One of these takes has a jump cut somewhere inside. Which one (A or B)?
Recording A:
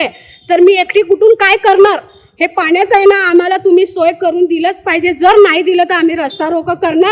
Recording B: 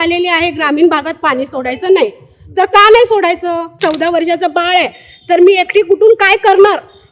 B